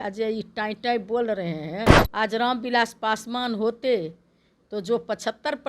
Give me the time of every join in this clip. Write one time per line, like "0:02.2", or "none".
0:02.0

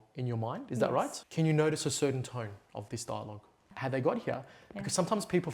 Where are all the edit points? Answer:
0:01.2
0:03.7

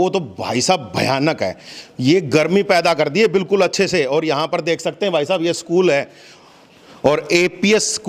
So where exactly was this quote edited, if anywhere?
none

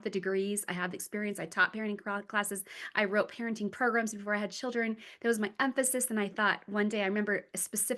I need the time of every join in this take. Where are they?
none

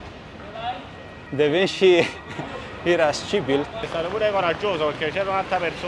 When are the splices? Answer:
0:01.3
0:03.8

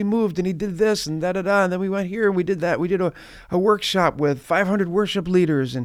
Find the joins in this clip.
none

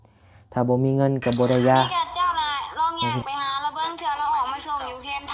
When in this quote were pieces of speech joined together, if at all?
0:01.9

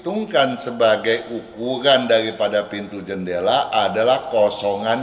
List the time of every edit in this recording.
none

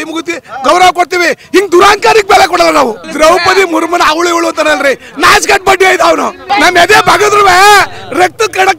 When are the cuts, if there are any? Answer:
0:03.0
0:06.4

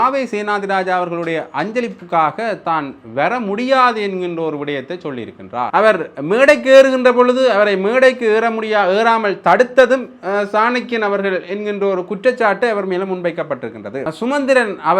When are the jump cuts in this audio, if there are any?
0:05.6
0:14.0

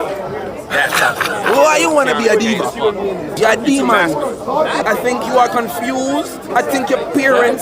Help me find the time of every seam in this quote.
0:03.3
0:04.8
0:06.5

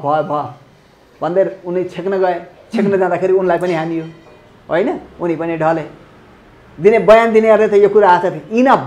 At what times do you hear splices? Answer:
none

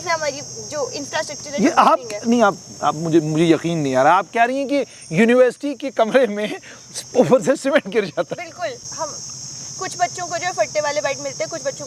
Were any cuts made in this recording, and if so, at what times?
0:08.8

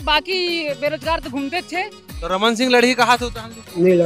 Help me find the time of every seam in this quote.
0:02.0

